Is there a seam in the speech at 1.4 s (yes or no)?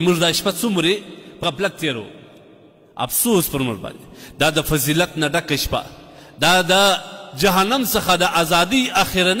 yes